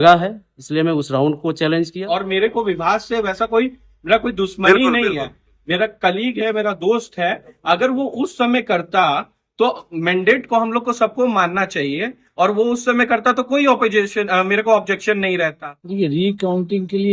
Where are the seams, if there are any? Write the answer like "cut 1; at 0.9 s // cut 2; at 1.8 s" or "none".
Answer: cut 1; at 2.1 s // cut 2; at 15.6 s